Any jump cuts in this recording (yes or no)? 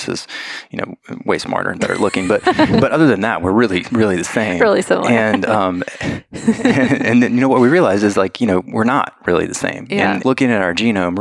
yes